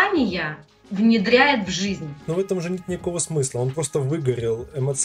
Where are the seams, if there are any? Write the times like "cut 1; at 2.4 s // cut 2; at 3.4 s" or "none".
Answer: cut 1; at 2.2 s